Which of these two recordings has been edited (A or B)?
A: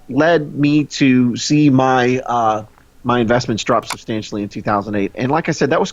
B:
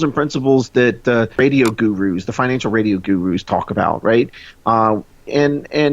B